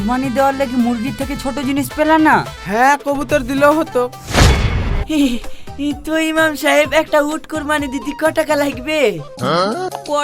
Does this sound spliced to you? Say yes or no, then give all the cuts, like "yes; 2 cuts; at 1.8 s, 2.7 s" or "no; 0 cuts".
yes; 1 cut; at 5.0 s